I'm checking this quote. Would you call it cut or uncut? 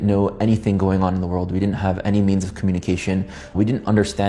uncut